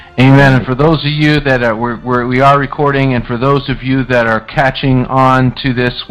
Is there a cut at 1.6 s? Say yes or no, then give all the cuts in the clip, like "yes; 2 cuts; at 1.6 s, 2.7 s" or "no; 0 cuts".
no; 0 cuts